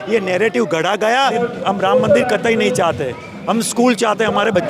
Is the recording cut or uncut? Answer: cut